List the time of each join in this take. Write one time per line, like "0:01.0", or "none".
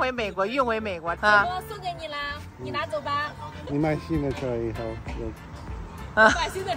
0:01.1